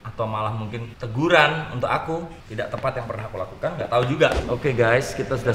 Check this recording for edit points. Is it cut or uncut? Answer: cut